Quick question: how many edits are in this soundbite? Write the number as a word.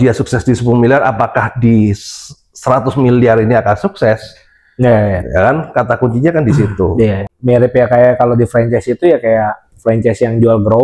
one